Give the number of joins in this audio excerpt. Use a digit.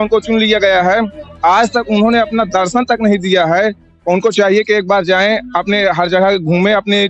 0